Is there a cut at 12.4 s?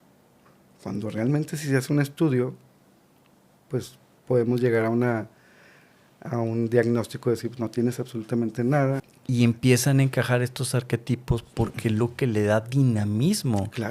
no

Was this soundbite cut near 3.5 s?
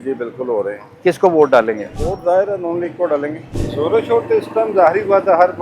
yes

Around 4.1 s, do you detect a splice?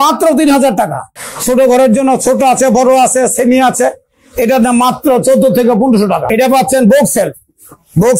no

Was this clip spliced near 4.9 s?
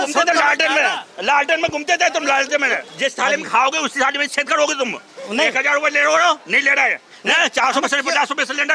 no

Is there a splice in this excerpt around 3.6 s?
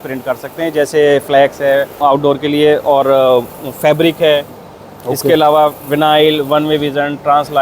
no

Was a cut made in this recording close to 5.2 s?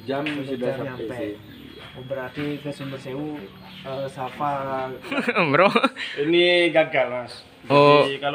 yes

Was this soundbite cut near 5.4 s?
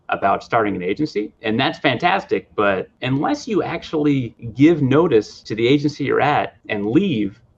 yes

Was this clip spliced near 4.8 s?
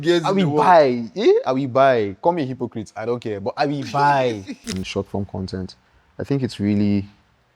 yes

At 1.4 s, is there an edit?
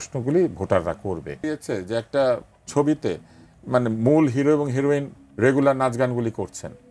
yes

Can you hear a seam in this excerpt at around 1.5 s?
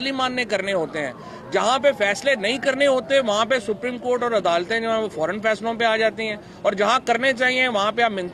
no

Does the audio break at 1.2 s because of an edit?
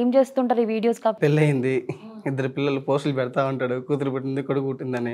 yes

